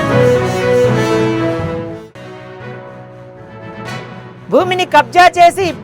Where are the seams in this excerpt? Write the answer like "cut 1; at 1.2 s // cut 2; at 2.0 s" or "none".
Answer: cut 1; at 1.9 s // cut 2; at 3.9 s